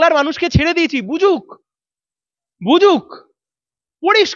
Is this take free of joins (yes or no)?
yes